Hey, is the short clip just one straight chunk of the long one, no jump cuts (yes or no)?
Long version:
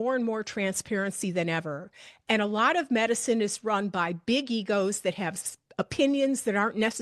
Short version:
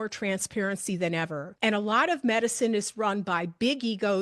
no